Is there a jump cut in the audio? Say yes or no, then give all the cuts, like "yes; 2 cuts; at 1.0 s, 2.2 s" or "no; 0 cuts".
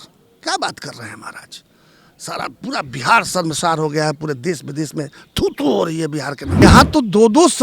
yes; 1 cut; at 6.6 s